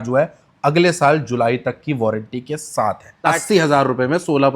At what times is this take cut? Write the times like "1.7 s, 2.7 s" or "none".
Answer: 3.2 s